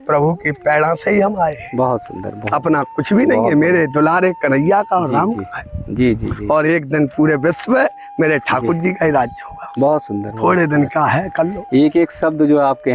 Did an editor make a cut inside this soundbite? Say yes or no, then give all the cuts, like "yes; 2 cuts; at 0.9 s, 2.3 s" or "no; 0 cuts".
no; 0 cuts